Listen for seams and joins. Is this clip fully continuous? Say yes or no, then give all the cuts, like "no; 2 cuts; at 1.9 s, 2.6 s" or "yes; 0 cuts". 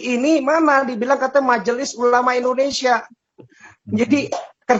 yes; 0 cuts